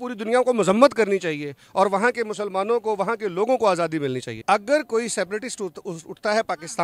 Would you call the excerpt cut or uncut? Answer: uncut